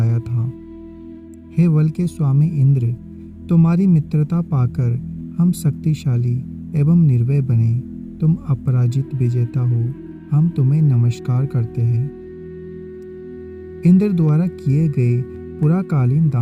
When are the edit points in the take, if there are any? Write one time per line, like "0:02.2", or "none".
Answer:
none